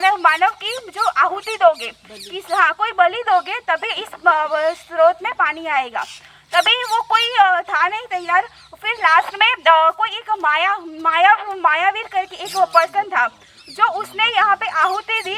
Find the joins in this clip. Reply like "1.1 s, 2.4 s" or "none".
none

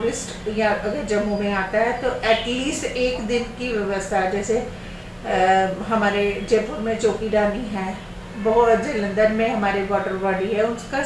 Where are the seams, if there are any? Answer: none

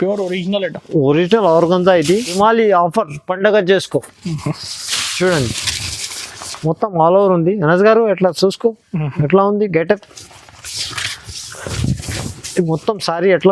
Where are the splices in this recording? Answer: 2.3 s

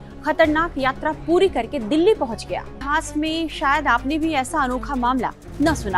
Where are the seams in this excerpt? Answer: 2.8 s

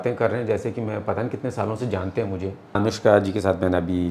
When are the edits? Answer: 2.8 s

